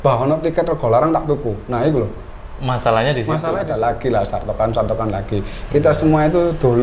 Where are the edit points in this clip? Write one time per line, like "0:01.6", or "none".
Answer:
0:03.6